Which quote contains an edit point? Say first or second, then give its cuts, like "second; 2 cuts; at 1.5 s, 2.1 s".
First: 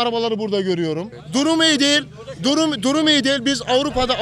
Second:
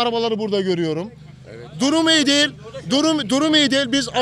first; 1 cut; at 1.1 s